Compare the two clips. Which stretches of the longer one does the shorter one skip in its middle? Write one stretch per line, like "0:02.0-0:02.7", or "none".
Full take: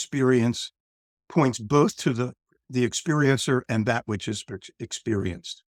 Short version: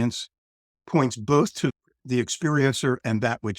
0:02.3-0:02.5